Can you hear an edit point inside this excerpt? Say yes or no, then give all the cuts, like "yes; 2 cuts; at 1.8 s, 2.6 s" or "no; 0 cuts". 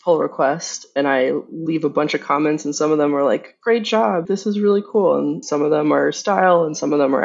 yes; 2 cuts; at 4.3 s, 5.4 s